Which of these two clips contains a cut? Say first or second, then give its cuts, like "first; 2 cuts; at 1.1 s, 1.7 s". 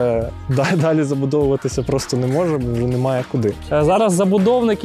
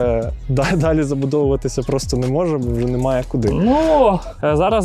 first; 1 cut; at 3.5 s